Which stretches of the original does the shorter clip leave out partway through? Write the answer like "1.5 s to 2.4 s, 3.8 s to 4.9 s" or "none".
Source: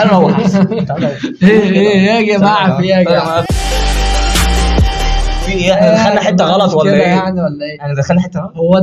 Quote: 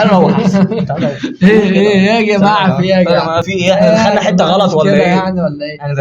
3.5 s to 5.5 s